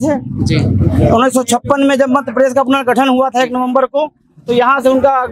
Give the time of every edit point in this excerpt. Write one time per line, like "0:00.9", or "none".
none